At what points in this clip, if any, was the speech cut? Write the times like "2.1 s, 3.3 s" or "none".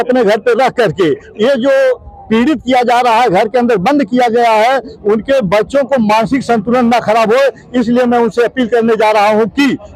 none